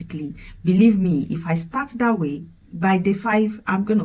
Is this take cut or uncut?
uncut